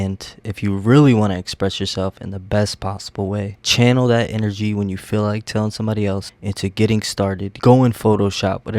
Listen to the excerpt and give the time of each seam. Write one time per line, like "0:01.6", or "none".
0:07.5

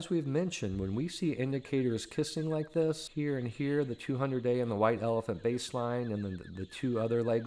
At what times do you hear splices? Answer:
0:03.1

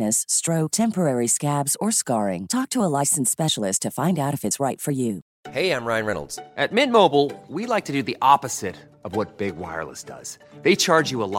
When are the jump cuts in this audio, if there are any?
0:05.3

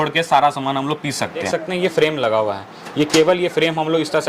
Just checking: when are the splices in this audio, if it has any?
0:01.5

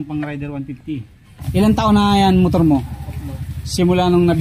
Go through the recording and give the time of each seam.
0:01.4

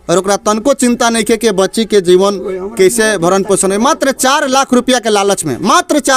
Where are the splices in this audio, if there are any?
none

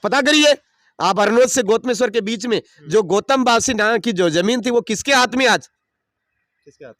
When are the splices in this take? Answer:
none

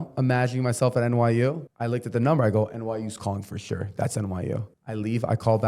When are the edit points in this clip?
0:01.7
0:04.8

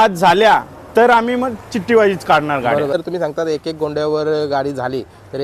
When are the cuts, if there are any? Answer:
0:02.9

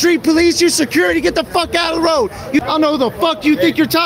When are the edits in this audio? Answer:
0:02.6

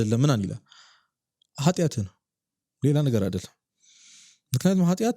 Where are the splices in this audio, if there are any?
none

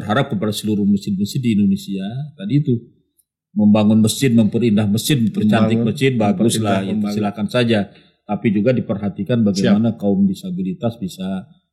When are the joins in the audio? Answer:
none

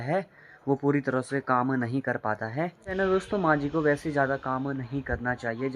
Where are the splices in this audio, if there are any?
0:02.7

